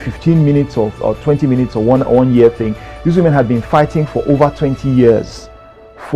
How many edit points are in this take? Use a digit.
0